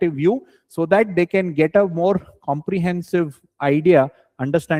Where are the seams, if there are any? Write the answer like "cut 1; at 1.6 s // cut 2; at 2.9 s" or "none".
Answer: none

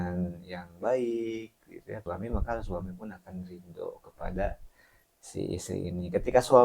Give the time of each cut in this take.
cut 1; at 2.0 s

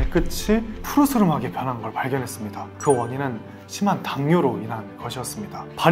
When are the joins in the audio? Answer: cut 1; at 2.7 s

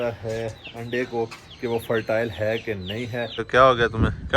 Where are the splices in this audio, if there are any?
cut 1; at 3.4 s

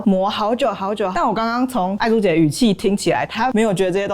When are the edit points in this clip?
cut 1; at 1.1 s // cut 2; at 3.3 s

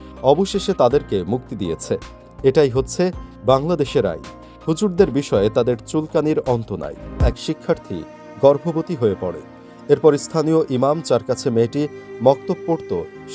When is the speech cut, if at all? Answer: cut 1; at 7.2 s

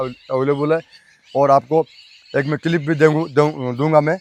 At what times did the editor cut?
none

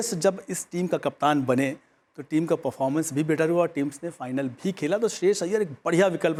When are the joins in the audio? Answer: none

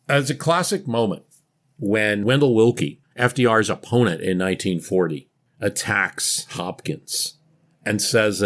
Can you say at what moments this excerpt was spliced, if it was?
cut 1; at 2.2 s // cut 2; at 3.0 s // cut 3; at 5.4 s

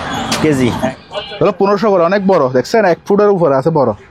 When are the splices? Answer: cut 1; at 0.9 s

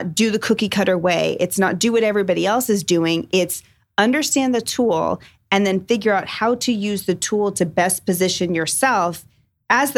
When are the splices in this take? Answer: none

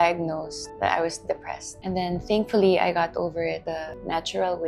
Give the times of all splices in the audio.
none

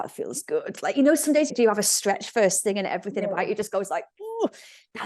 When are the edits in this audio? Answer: cut 1; at 1.5 s

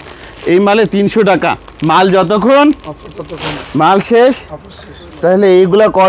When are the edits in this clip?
none

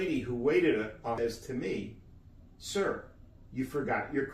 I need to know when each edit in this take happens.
cut 1; at 1.2 s

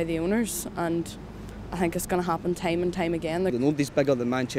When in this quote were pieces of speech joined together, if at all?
cut 1; at 3.5 s

